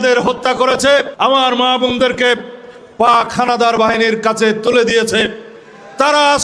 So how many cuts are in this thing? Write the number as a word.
one